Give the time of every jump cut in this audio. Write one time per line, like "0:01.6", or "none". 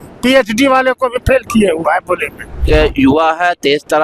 0:02.6